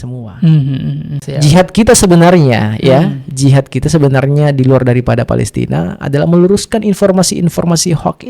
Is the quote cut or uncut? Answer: cut